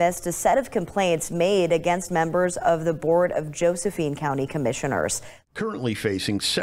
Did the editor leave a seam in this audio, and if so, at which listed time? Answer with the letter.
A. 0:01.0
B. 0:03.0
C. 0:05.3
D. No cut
C